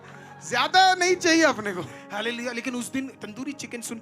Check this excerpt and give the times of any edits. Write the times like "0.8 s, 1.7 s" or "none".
2.0 s

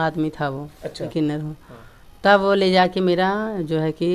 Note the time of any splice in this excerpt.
1.1 s

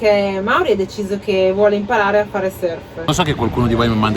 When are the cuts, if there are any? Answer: 3.1 s

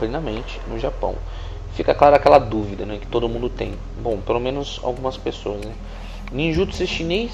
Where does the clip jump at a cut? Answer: 3.1 s

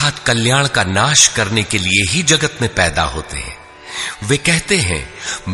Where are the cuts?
none

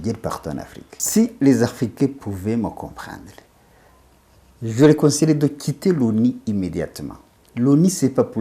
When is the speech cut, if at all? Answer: 1.0 s

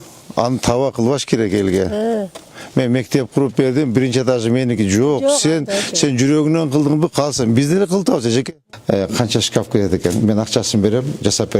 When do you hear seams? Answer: 8.6 s

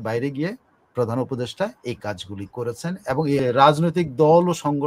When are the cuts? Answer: 3.4 s

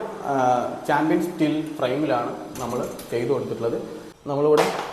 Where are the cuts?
4.0 s

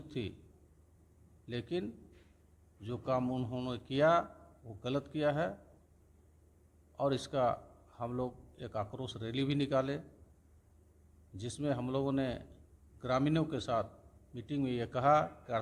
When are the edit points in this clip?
none

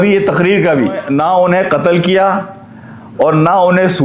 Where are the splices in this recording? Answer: 1.0 s

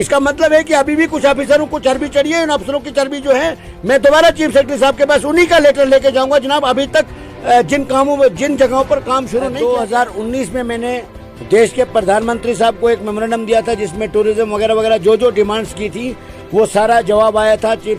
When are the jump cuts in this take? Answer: 9.4 s

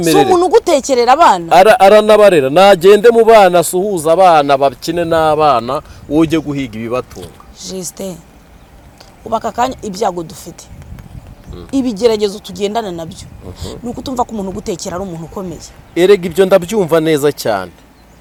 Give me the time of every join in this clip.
none

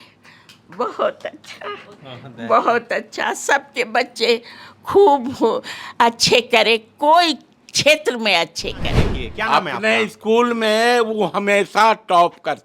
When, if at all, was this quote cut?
9.2 s

